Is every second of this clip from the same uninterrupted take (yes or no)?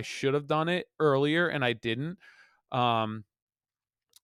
yes